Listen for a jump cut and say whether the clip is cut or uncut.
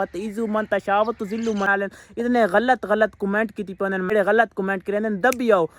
cut